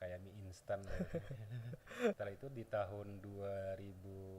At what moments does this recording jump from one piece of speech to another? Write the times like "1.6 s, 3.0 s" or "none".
2.2 s